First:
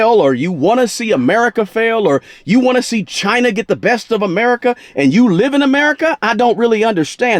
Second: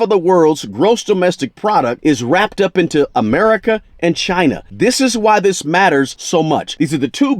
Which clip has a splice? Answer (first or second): second